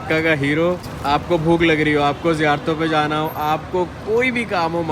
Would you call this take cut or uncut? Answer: cut